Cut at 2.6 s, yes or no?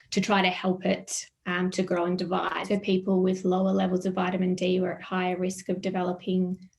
yes